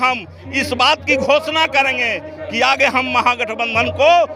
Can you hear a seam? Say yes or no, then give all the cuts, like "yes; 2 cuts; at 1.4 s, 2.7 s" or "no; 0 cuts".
no; 0 cuts